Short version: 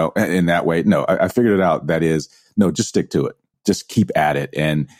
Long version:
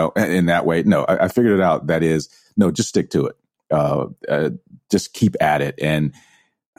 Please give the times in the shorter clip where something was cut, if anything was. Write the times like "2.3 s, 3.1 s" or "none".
3.5 s